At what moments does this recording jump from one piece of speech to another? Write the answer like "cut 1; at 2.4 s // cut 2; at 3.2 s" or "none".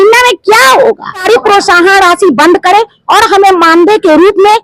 cut 1; at 1.2 s